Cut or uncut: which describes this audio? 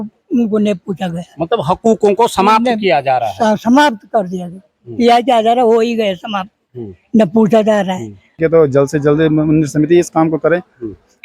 cut